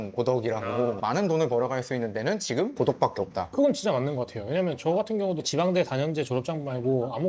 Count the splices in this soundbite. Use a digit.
1